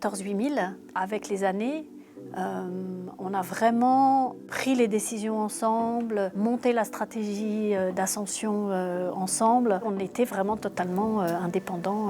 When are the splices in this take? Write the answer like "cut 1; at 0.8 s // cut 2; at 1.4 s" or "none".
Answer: cut 1; at 9.8 s